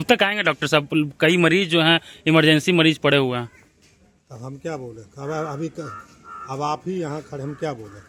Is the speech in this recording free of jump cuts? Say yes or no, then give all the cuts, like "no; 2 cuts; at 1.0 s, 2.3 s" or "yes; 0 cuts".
yes; 0 cuts